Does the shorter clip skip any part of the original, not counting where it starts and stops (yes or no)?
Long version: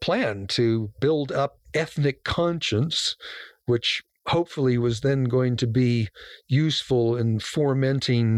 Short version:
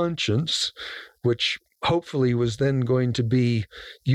no